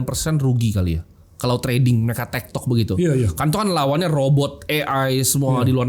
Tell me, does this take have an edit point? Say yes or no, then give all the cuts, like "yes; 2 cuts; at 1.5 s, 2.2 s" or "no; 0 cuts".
no; 0 cuts